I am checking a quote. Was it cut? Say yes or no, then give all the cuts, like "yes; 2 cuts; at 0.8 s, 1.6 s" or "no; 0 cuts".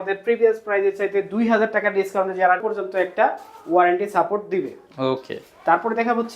yes; 1 cut; at 2.6 s